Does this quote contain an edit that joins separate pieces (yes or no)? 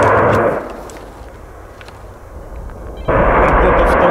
yes